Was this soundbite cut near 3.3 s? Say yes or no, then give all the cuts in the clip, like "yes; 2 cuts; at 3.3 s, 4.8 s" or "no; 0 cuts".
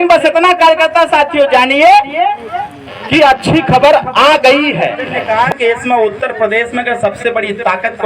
no; 1 cut; at 5.2 s